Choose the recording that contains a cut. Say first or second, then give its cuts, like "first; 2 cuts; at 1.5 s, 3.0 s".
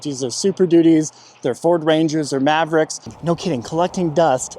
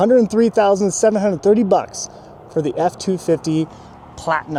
first; 1 cut; at 3.1 s